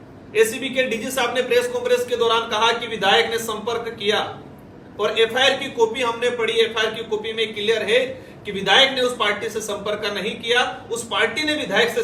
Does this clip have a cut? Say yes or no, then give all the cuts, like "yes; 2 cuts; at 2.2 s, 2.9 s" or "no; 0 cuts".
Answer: no; 0 cuts